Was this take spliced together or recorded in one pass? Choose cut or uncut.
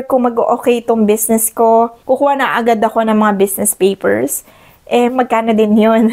cut